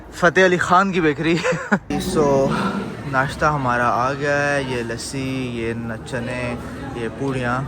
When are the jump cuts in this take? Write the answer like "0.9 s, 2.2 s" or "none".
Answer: 1.9 s